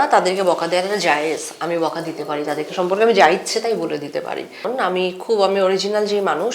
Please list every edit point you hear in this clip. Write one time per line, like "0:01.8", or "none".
0:04.7